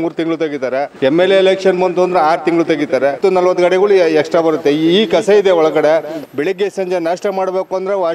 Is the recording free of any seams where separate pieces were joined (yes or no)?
no